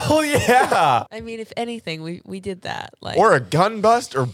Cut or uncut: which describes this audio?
uncut